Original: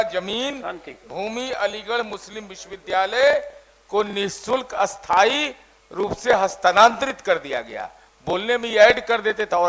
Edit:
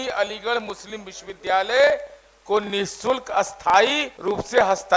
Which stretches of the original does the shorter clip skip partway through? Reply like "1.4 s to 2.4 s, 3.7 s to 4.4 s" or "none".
5.5 s to 5.8 s